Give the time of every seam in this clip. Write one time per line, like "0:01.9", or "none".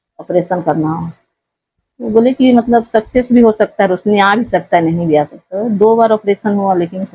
none